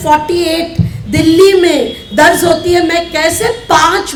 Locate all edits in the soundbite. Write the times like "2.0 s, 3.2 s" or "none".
none